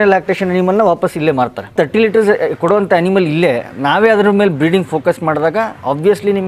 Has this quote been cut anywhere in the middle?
yes; 1 cut; at 1.7 s

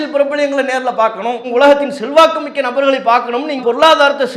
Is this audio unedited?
no; 2 cuts; at 1.4 s, 3.6 s

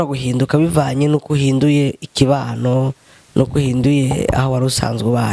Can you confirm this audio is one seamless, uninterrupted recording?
yes; 0 cuts

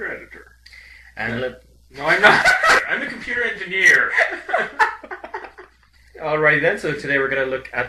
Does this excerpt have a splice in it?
yes; 1 cut; at 4.4 s

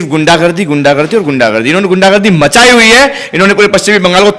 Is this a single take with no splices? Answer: yes; 0 cuts

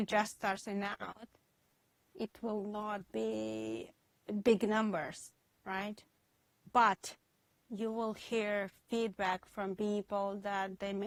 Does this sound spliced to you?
no; 0 cuts

